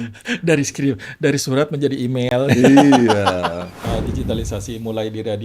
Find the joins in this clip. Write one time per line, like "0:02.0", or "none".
0:03.9

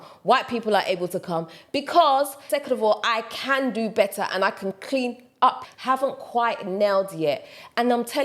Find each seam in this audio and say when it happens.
0:02.4
0:05.7

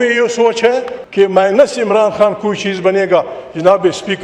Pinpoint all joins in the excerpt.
0:01.0

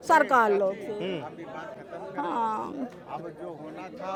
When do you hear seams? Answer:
none

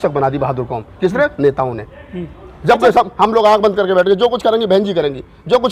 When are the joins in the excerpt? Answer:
none

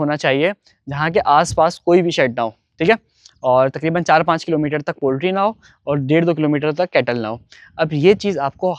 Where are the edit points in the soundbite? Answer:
none

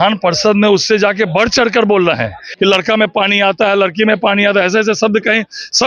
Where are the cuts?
0:02.5

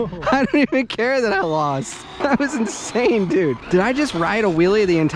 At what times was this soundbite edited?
0:02.2
0:03.6

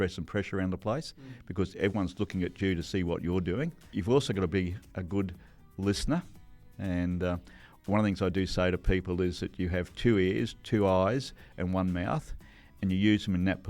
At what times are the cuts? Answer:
0:03.9

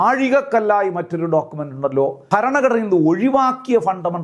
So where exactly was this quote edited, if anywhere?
0:02.2

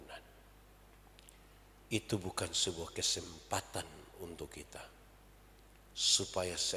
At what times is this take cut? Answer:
none

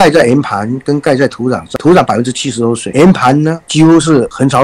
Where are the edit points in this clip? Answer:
0:01.7
0:02.8

